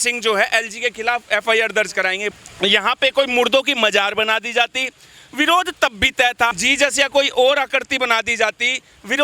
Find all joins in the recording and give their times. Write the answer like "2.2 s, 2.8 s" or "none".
2.4 s, 6.6 s